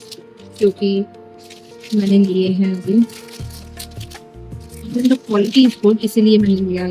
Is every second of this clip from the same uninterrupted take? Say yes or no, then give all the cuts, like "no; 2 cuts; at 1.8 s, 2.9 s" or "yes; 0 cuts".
yes; 0 cuts